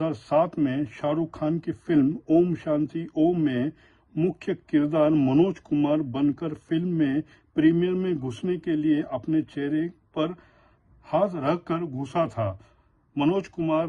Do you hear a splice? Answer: no; 0 cuts

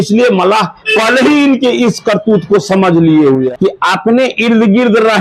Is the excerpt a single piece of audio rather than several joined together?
no; 1 cut; at 3.5 s

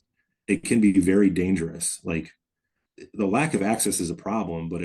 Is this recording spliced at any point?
no; 0 cuts

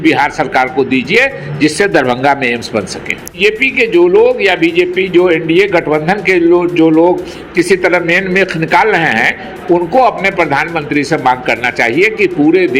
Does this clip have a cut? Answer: yes; 1 cut; at 3.4 s

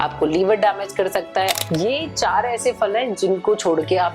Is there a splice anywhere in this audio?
yes; 1 cut; at 1.5 s

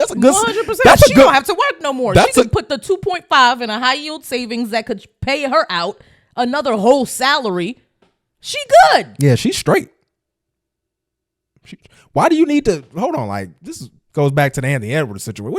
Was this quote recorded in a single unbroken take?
yes; 0 cuts

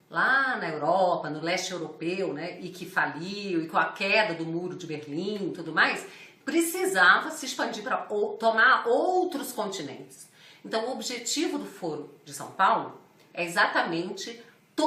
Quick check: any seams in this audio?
yes; 1 cut; at 9.3 s

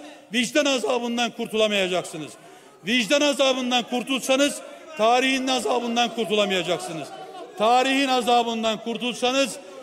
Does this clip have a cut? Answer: no; 0 cuts

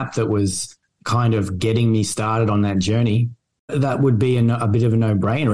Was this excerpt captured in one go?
no; 1 cut; at 3.5 s

